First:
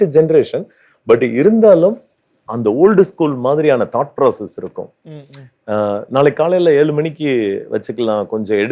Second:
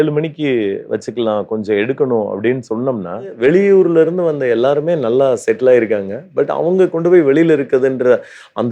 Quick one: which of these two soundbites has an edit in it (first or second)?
second